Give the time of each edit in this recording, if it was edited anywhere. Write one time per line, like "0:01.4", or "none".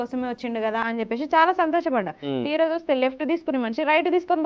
none